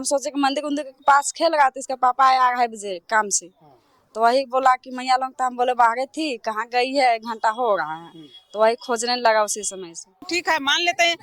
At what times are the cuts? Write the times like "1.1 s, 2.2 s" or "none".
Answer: 10.3 s